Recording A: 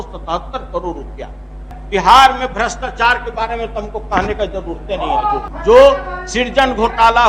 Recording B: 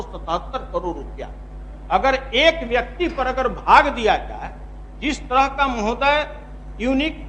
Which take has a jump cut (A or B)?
A